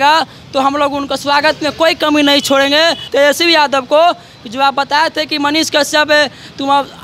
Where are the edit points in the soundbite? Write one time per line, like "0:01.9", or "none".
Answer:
0:03.0